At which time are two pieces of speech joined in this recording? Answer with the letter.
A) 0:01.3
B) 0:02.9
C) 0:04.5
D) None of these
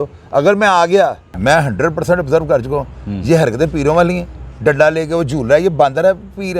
A